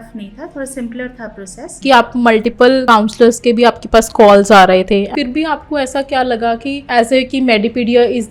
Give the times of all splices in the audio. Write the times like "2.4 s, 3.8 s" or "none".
1.8 s, 5.1 s